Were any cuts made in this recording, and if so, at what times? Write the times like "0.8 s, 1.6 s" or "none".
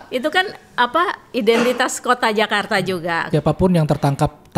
3.3 s